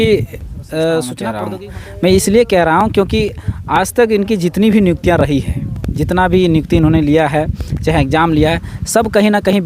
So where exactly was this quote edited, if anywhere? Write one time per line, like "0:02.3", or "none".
0:01.3